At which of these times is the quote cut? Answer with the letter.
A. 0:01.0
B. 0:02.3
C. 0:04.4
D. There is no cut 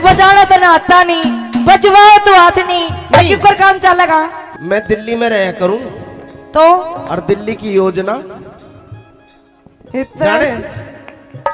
C